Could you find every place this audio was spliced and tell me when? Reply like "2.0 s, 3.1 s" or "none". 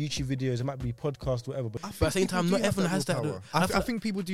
1.8 s